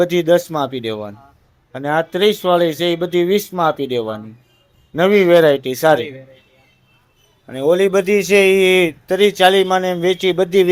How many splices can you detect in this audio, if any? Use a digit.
0